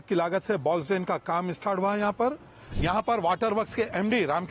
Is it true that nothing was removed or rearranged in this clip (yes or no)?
no